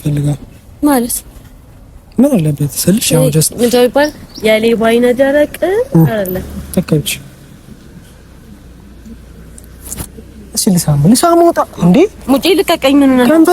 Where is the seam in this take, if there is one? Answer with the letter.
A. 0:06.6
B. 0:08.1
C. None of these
A